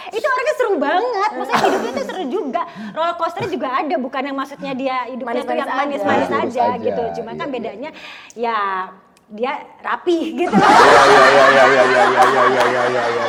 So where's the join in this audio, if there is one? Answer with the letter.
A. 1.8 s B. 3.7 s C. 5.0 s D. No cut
D